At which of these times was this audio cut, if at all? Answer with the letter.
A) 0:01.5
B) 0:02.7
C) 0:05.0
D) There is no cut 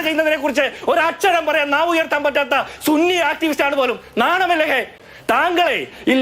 C